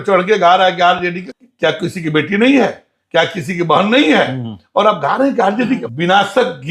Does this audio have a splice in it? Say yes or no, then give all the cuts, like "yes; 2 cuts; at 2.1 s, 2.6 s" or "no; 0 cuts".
yes; 2 cuts; at 1.3 s, 5.8 s